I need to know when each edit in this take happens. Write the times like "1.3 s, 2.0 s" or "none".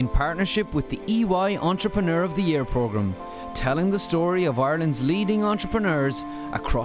none